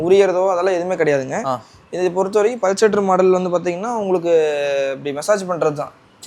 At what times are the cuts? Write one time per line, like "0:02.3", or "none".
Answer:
none